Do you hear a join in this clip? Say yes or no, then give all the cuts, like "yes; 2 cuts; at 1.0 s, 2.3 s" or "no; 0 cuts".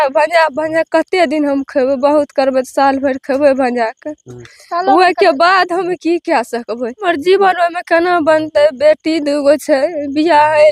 yes; 1 cut; at 7.0 s